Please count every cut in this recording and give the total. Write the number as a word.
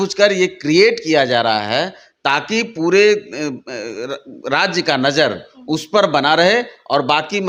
zero